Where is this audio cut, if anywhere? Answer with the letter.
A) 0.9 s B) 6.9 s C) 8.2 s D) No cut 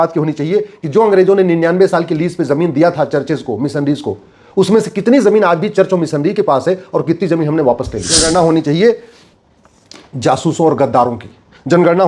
C